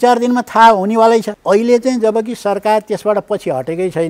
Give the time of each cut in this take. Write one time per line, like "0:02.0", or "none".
0:01.3